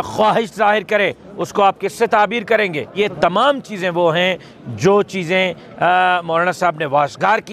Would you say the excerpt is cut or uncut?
cut